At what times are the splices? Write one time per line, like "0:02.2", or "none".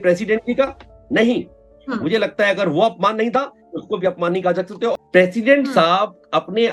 0:05.0